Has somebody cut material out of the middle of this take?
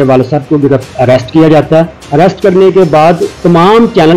yes; 2 cuts; at 2.0 s, 3.3 s

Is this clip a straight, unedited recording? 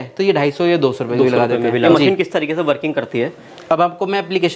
no; 1 cut; at 1.9 s

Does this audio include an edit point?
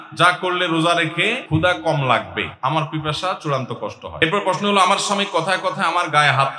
yes; 3 cuts; at 1.4 s, 2.5 s, 4.2 s

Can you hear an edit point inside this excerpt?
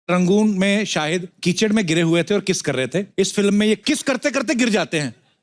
yes; 3 cuts; at 1.3 s, 3.1 s, 3.8 s

